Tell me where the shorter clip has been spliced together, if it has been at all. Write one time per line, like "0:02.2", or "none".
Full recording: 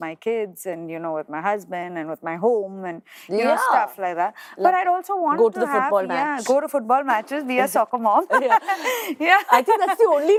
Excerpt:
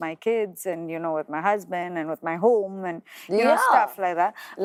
none